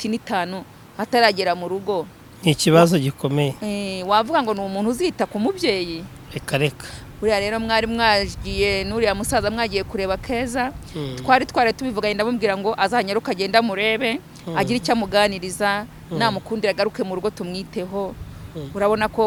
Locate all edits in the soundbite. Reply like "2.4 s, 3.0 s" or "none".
none